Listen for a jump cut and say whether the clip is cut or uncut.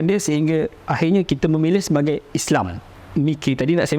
cut